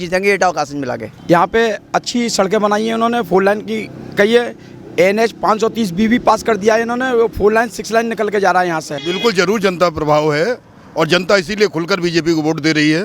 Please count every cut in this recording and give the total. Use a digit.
2